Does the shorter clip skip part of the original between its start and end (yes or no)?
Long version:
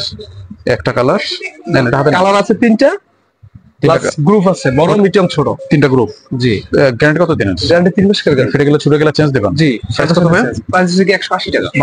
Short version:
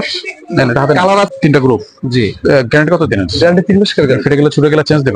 yes